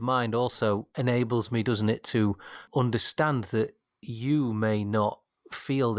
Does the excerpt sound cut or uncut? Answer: cut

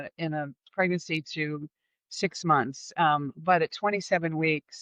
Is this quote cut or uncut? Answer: uncut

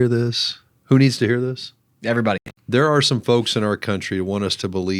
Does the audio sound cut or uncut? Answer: cut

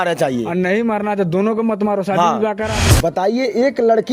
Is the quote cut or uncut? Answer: cut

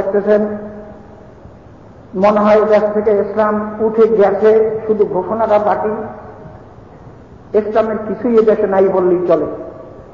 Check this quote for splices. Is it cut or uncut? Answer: uncut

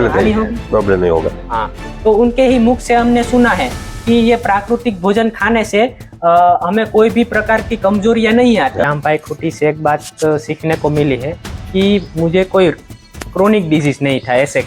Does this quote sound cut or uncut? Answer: cut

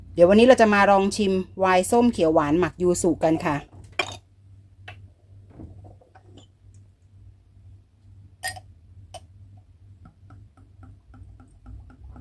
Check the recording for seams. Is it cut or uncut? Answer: cut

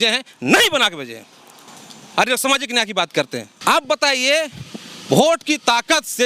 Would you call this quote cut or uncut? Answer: cut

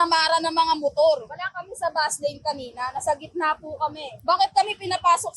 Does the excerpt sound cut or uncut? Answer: cut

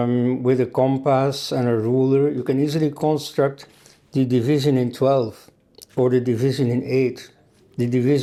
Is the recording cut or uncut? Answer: uncut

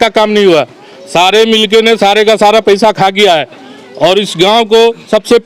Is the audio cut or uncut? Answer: uncut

